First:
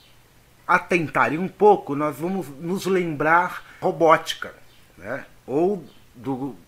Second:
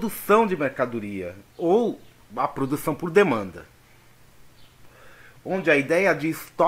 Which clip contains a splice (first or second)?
first